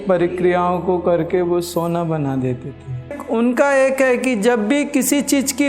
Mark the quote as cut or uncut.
cut